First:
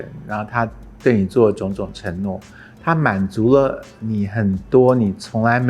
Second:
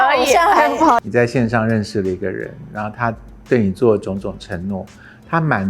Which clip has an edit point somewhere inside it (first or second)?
second